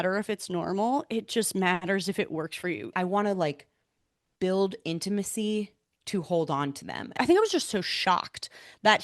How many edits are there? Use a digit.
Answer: 2